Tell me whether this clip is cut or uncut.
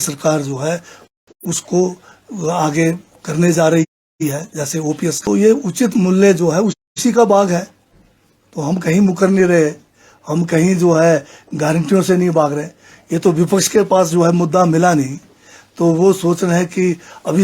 cut